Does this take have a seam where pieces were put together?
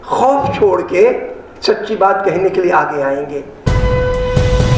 yes; 1 cut; at 3.7 s

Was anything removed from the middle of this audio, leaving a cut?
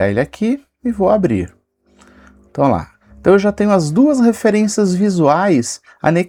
no; 0 cuts

